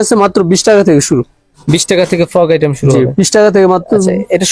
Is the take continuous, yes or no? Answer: yes